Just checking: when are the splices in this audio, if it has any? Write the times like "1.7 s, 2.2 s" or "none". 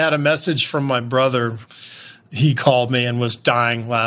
1.6 s